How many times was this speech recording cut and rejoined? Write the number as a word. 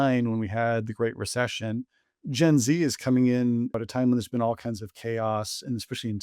one